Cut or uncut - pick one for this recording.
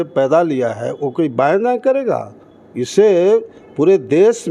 uncut